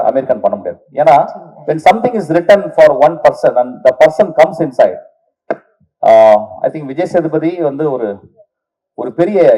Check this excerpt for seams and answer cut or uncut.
uncut